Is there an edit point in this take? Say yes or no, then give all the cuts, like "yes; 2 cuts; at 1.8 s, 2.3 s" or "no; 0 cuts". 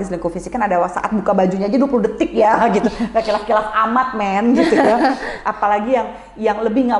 no; 0 cuts